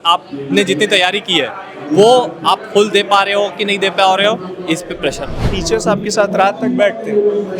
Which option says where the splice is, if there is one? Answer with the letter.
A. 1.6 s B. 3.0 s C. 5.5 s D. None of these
C